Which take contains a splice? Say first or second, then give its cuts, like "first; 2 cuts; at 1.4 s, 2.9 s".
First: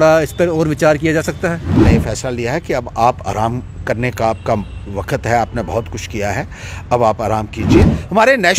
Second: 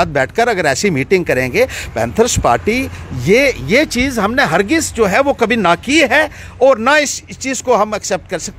first; 2 cuts; at 1.8 s, 7.8 s